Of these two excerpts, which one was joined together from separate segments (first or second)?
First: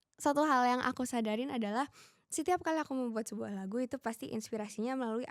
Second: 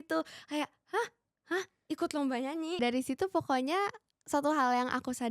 second